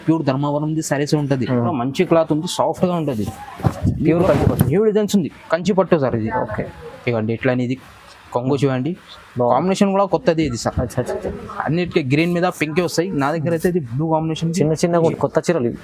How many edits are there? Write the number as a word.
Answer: two